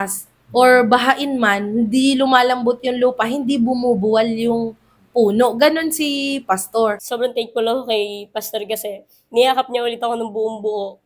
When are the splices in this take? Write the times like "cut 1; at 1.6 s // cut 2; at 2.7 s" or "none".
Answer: cut 1; at 7.0 s